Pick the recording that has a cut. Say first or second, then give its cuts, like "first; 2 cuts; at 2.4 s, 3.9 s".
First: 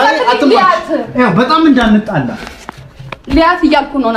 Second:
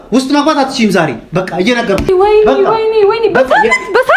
second; 1 cut; at 2.1 s